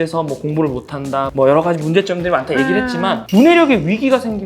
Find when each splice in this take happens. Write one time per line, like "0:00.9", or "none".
0:03.2